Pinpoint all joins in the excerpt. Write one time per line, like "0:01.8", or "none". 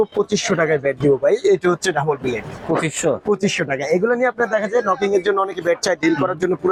none